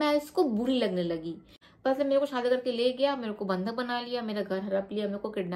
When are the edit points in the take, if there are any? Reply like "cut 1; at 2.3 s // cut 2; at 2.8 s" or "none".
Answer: cut 1; at 1.6 s